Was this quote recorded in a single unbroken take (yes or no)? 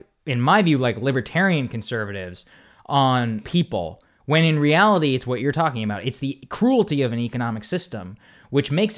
no